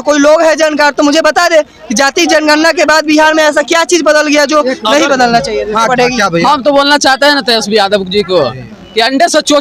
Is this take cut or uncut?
uncut